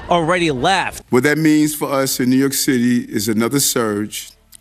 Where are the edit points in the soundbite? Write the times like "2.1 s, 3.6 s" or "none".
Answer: 1.0 s